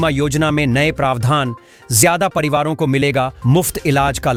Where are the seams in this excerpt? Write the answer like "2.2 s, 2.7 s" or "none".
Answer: none